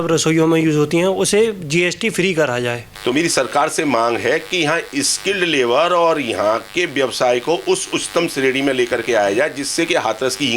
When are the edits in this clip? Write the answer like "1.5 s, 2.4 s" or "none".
2.9 s

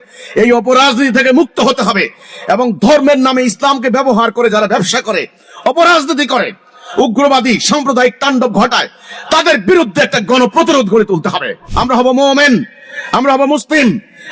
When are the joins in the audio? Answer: 11.6 s

